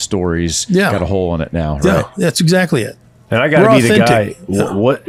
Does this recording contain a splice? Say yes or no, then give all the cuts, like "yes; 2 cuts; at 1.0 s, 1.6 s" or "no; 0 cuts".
no; 0 cuts